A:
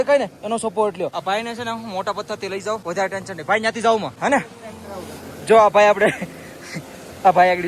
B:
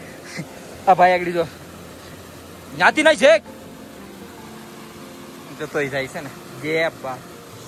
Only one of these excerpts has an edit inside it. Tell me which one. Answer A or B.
A